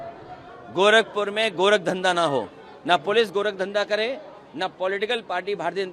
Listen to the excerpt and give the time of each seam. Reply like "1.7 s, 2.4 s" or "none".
none